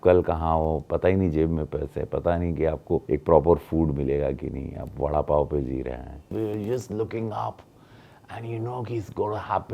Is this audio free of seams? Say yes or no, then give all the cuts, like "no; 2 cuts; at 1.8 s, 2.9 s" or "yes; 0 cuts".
no; 2 cuts; at 3.0 s, 6.3 s